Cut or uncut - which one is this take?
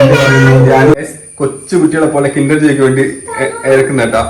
cut